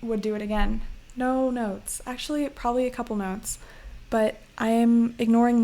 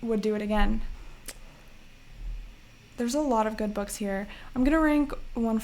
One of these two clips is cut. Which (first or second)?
first